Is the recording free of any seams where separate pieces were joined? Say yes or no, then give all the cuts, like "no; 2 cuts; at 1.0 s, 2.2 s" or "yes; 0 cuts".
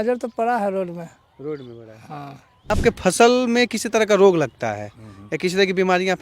no; 1 cut; at 2.7 s